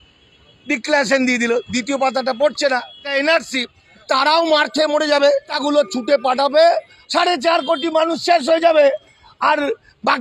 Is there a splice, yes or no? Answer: yes